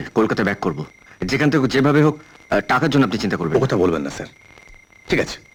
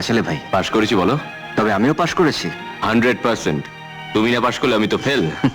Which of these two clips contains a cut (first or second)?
second